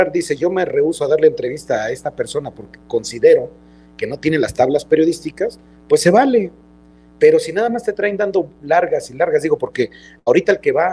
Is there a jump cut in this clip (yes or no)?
no